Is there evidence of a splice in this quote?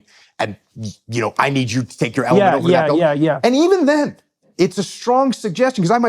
yes; 1 cut; at 4.4 s

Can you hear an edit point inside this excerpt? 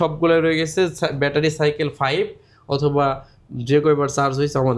no; 0 cuts

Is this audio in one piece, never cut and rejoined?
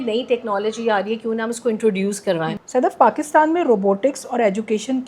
no; 1 cut; at 2.6 s

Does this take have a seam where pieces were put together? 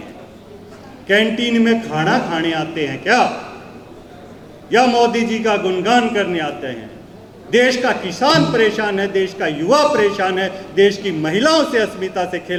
no; 0 cuts

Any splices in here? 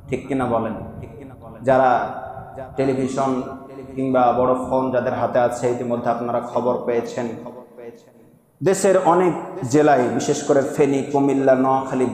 no; 0 cuts

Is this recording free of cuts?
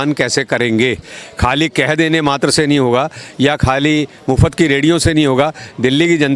yes; 0 cuts

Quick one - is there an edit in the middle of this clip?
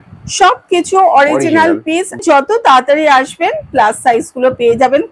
yes; 1 cut; at 2.2 s

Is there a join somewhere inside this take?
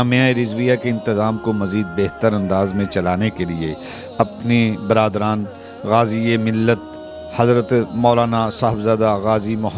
no; 0 cuts

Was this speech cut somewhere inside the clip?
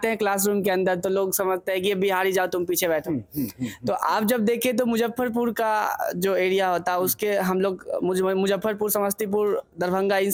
no; 0 cuts

